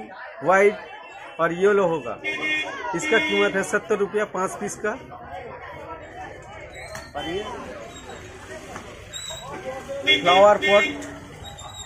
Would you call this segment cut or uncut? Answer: cut